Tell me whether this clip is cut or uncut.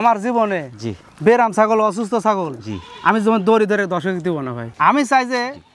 cut